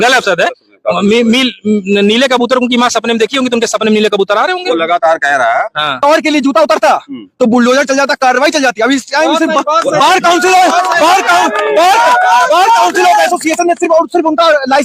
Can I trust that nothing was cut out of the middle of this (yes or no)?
no